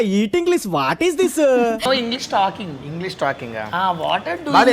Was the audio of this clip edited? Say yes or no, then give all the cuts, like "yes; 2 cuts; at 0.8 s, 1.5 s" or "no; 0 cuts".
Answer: yes; 1 cut; at 1.9 s